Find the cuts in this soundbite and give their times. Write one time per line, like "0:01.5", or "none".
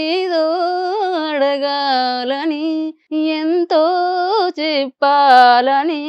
0:03.0